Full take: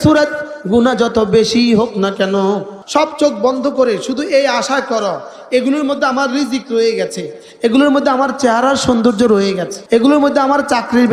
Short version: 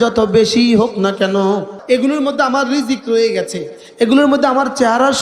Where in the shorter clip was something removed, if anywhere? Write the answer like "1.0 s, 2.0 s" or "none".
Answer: 1.7 s